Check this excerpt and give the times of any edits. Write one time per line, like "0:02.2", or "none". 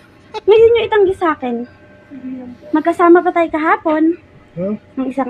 0:03.6